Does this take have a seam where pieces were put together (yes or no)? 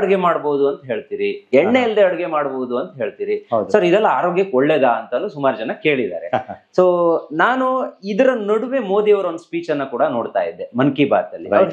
no